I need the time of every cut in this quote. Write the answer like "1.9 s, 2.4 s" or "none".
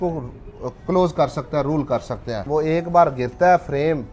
2.4 s